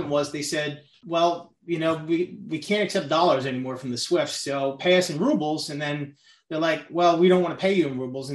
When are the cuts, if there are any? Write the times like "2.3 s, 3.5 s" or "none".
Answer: 1.0 s

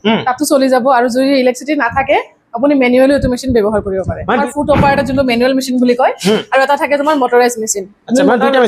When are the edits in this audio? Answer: 4.4 s

